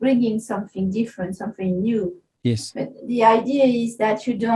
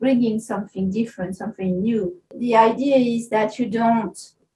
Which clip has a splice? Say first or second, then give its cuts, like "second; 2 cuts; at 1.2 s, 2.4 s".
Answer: second; 1 cut; at 2.3 s